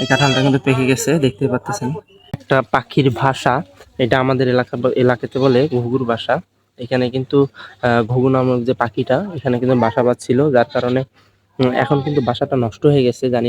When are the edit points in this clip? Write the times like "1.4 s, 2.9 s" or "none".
2.4 s